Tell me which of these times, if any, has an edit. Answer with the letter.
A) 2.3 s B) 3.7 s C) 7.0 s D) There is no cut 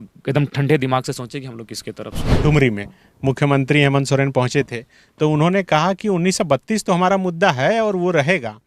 A